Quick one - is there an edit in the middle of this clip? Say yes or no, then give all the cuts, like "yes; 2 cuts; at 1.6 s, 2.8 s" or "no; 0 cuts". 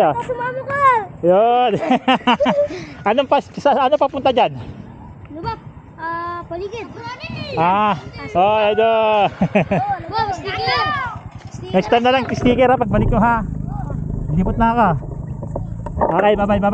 no; 0 cuts